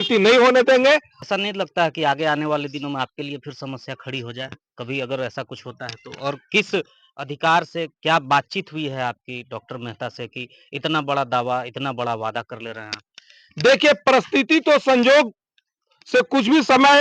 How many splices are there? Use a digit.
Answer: 1